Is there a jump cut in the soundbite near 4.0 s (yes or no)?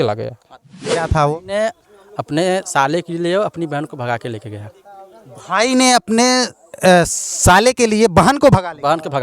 no